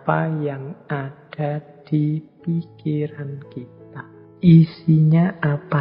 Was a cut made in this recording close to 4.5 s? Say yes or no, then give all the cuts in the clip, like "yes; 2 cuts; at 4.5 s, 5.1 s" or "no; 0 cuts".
yes; 1 cut; at 4.5 s